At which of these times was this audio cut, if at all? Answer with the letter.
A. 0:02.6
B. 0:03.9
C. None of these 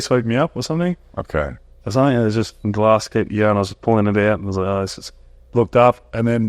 A